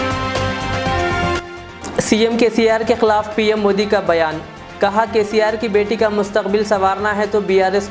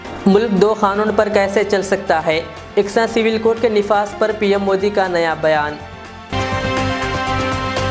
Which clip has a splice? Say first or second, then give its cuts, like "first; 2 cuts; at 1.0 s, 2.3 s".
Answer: first; 1 cut; at 1.4 s